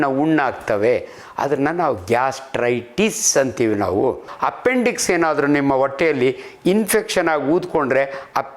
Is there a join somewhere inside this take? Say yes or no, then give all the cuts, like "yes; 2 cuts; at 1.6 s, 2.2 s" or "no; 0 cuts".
yes; 1 cut; at 4.3 s